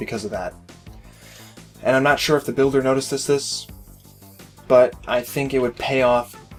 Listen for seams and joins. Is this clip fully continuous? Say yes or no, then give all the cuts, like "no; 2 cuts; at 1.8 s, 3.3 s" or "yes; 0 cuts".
yes; 0 cuts